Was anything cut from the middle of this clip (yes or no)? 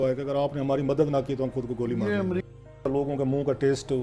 yes